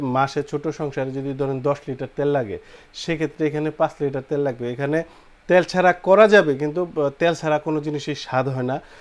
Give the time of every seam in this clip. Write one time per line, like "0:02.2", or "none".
none